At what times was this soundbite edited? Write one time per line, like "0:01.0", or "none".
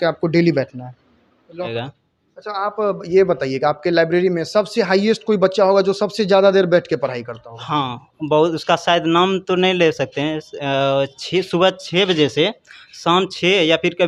0:01.7